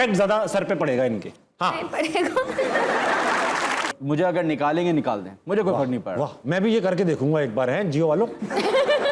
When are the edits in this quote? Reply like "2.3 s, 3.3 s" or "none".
3.9 s